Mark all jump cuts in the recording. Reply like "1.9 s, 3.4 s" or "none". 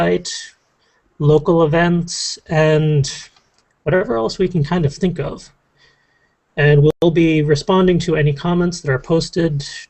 none